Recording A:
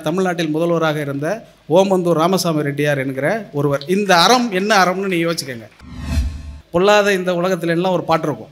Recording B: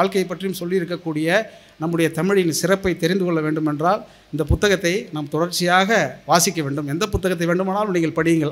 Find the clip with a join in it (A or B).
A